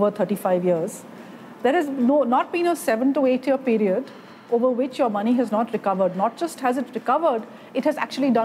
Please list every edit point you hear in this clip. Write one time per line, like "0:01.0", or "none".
none